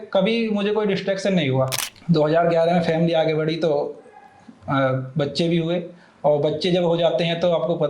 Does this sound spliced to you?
yes; 1 cut; at 1.7 s

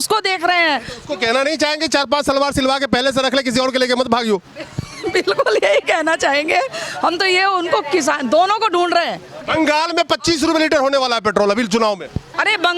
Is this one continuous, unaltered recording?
no; 1 cut; at 9.5 s

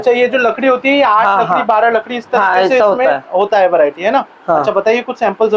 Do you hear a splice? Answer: no; 0 cuts

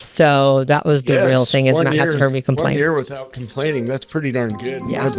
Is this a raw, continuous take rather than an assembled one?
yes; 0 cuts

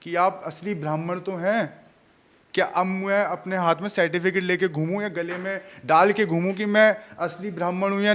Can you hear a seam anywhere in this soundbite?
no; 0 cuts

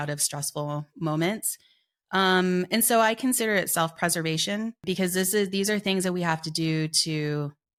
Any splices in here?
no; 0 cuts

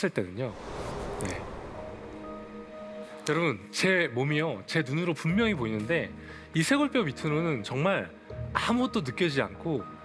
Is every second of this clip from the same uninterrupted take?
no; 1 cut; at 3.1 s

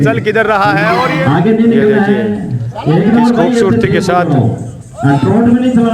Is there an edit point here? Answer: yes; 1 cut; at 1.2 s

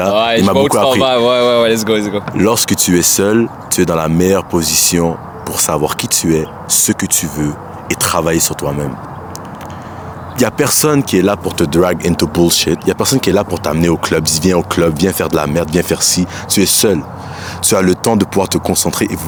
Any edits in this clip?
no; 0 cuts

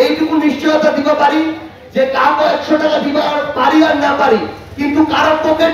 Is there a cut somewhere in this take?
no; 0 cuts

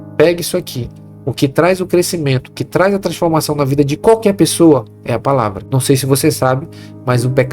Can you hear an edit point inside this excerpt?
yes; 1 cut; at 5.6 s

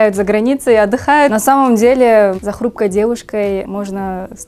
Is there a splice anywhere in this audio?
yes; 3 cuts; at 1.3 s, 2.4 s, 3.7 s

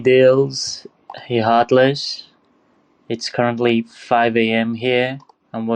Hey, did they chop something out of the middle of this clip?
no; 0 cuts

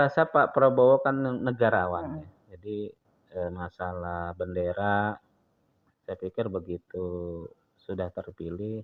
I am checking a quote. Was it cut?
no; 0 cuts

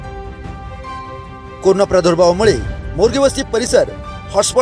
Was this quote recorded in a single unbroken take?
no; 1 cut; at 1.0 s

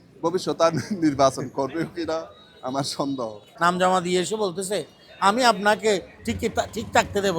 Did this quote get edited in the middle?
yes; 2 cuts; at 3.4 s, 6.2 s

